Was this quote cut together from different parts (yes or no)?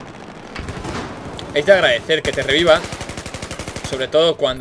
yes